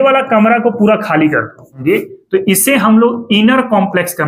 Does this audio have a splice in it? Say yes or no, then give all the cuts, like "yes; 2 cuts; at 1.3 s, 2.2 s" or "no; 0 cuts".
yes; 1 cut; at 1.7 s